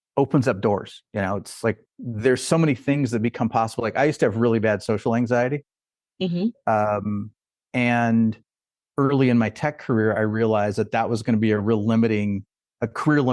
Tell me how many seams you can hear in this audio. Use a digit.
1